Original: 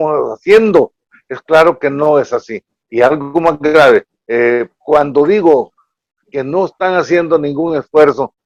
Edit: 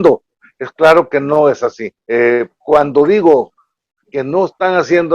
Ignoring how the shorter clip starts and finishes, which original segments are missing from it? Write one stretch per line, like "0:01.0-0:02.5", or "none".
0:02.7-0:04.2